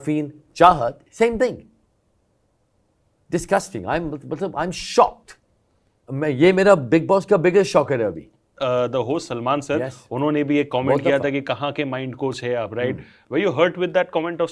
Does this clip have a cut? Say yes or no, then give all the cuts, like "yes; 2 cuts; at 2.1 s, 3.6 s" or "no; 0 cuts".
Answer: yes; 1 cut; at 8.5 s